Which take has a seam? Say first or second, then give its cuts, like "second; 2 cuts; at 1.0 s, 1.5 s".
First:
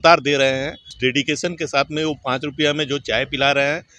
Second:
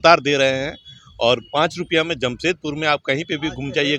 first; 1 cut; at 0.9 s